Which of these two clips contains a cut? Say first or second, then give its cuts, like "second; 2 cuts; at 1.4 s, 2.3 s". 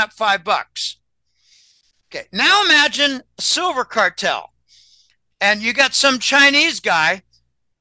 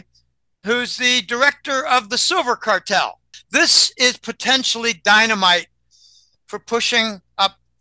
second; 1 cut; at 3.4 s